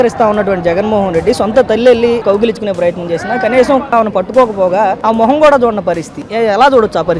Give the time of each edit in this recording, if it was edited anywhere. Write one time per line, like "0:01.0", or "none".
0:02.2
0:03.9
0:05.0
0:06.2